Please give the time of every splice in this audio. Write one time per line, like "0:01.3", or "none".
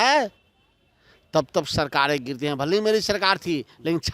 none

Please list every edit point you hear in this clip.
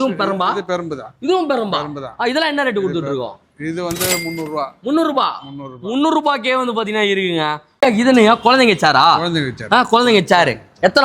0:07.7

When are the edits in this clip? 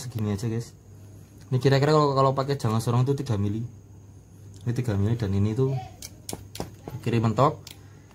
none

